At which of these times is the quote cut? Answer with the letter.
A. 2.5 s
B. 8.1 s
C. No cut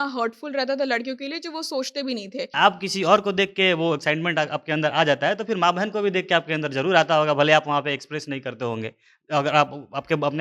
A